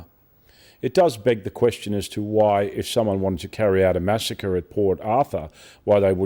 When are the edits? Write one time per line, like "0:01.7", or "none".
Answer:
none